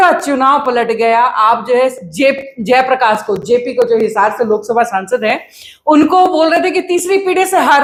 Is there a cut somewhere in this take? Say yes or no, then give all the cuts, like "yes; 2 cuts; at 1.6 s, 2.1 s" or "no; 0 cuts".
no; 0 cuts